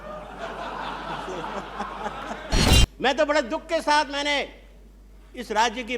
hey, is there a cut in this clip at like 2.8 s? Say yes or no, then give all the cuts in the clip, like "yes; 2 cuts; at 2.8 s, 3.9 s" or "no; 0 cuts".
yes; 1 cut; at 2.8 s